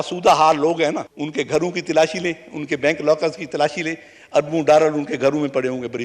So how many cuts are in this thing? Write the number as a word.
one